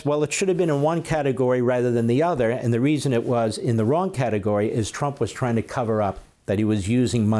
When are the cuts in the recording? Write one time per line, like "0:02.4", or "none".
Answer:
0:06.3